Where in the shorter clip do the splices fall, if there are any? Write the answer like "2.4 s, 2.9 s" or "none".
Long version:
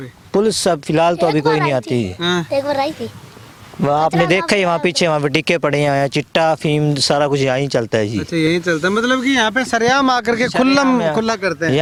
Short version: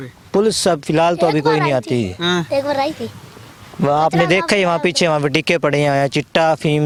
none